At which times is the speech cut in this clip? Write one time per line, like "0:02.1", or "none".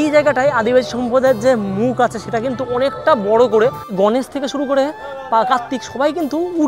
0:03.9